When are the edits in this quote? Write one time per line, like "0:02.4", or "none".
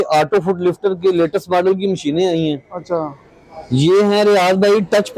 none